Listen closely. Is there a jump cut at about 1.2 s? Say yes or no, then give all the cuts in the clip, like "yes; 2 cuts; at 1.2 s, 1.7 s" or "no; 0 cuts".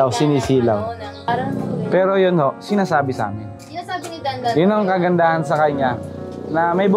yes; 1 cut; at 1.2 s